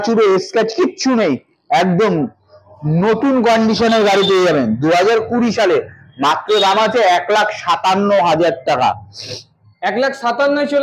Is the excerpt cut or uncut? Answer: uncut